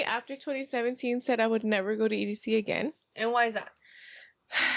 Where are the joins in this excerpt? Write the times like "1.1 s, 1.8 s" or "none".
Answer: none

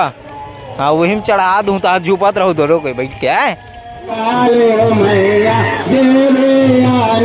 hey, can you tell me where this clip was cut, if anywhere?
4.1 s

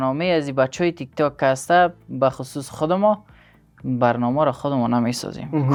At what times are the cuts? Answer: none

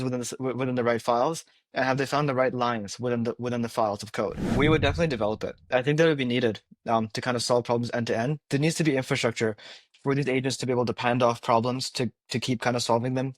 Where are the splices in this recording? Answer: 4.4 s

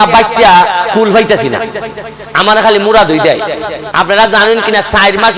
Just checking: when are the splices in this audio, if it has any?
3.8 s

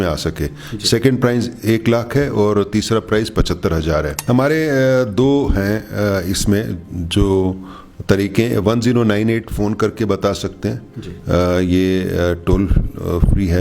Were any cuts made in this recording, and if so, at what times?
4.1 s

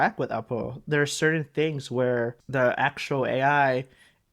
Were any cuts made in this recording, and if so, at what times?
2.4 s

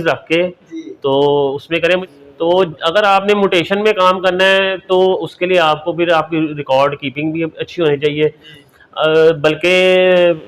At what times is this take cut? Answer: 2.0 s

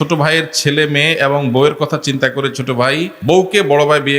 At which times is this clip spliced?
3.2 s

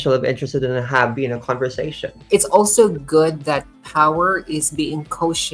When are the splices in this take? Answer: 2.1 s

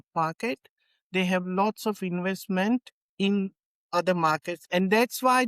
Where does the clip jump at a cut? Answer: 4.5 s

